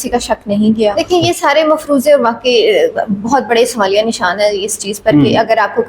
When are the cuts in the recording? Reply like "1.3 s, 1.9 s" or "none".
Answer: 0.9 s